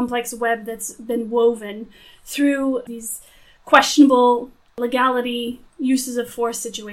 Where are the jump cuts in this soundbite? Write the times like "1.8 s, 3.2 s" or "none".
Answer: 2.8 s, 4.7 s